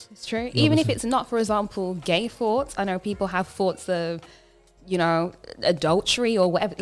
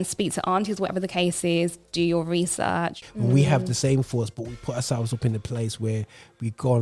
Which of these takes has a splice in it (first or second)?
second